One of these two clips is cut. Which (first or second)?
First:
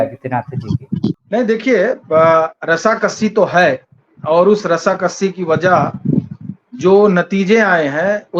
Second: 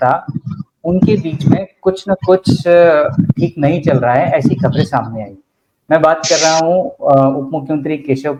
first